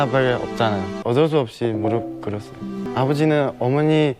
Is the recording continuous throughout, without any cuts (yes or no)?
no